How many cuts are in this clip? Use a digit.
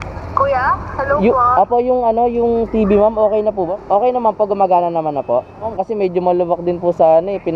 2